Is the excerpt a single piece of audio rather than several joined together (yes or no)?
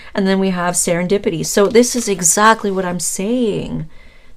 yes